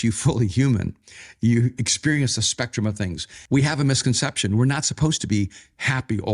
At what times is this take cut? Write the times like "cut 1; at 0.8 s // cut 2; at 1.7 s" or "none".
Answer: cut 1; at 3.3 s